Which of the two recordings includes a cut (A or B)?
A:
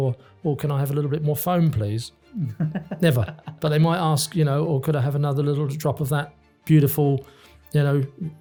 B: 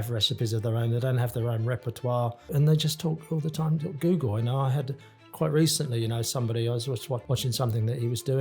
B